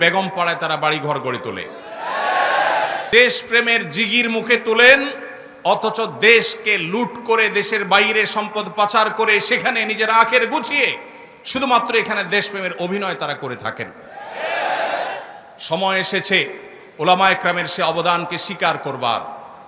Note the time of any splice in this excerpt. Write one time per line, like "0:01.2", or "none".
0:03.0